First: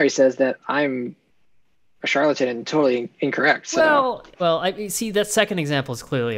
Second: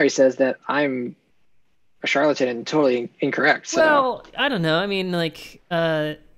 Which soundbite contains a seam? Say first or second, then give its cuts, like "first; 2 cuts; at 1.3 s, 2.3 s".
first; 1 cut; at 4.3 s